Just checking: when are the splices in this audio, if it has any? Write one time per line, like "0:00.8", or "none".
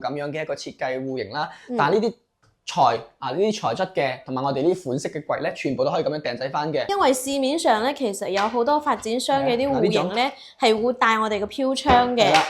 0:06.9